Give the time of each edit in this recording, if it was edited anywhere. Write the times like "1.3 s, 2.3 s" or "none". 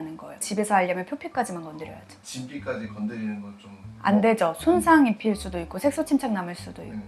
none